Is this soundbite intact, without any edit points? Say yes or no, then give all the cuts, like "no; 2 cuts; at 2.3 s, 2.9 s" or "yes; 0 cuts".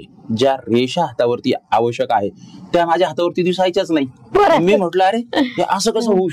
yes; 0 cuts